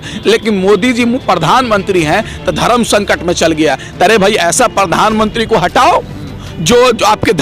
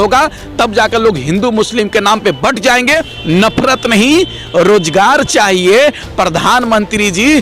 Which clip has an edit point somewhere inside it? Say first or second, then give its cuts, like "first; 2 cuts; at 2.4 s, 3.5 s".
second; 1 cut; at 3.1 s